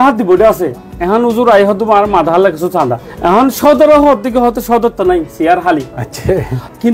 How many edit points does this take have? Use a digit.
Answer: 0